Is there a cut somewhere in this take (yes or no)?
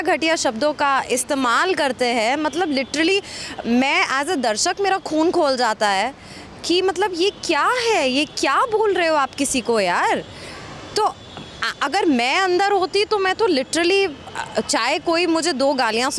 no